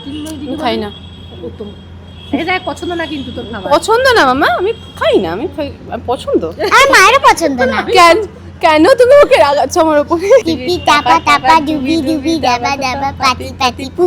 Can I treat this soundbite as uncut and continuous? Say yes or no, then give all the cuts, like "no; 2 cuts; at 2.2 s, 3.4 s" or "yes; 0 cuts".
no; 1 cut; at 10.4 s